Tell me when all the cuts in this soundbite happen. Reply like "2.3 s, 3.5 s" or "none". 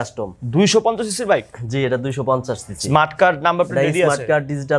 none